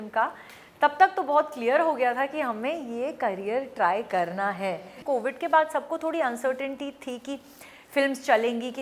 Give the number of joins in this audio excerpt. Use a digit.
1